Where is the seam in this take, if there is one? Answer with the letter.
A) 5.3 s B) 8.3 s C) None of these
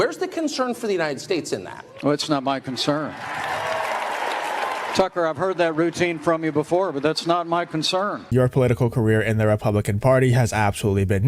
B